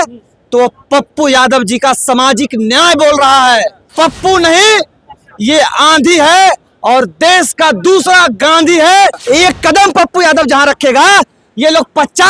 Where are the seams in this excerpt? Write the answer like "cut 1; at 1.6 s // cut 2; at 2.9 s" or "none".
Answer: cut 1; at 3.9 s // cut 2; at 9.2 s